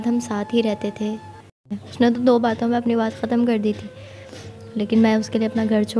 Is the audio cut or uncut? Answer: cut